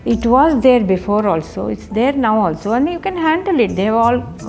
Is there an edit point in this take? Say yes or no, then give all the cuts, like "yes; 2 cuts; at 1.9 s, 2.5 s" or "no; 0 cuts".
no; 0 cuts